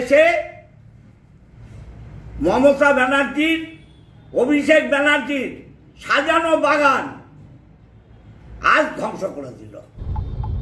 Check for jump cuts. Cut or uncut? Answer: uncut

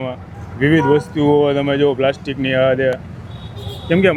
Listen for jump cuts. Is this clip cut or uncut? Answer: uncut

